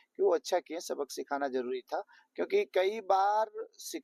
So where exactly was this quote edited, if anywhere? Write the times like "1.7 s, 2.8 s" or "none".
none

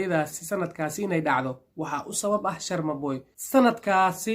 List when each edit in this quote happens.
3.3 s

